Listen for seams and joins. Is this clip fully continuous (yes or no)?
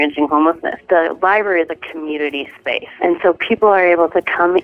no